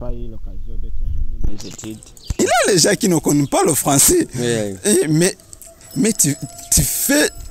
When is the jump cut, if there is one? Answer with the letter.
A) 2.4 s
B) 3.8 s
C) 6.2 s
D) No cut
A